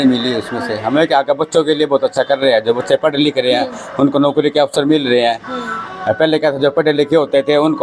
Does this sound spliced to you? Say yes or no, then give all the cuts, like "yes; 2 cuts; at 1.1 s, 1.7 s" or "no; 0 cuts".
no; 0 cuts